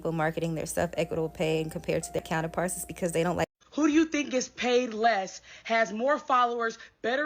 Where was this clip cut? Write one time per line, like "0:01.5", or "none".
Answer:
0:02.2
0:03.5